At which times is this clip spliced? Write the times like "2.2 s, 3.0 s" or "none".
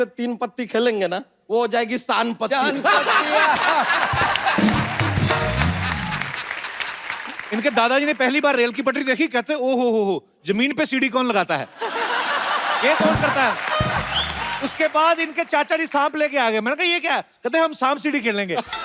1.3 s, 7.4 s, 14.5 s